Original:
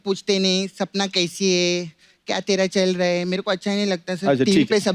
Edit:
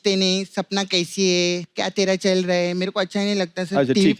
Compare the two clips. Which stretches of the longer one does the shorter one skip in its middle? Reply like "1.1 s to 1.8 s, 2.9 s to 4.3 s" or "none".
1.9 s to 2.2 s